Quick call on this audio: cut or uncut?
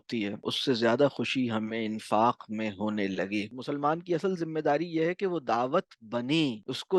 cut